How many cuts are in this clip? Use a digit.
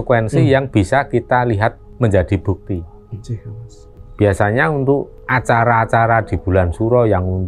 0